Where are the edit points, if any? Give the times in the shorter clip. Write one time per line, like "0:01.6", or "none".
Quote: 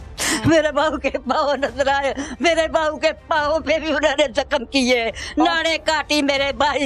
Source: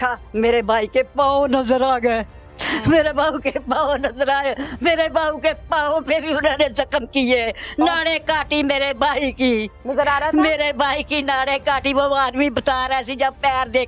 none